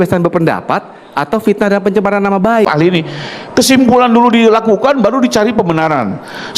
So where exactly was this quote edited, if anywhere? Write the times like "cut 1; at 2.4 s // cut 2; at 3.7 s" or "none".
cut 1; at 2.7 s